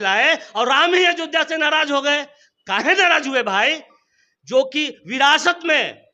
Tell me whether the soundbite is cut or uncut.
uncut